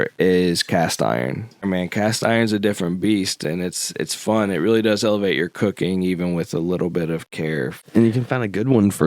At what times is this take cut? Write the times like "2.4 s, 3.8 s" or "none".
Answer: 1.6 s, 7.8 s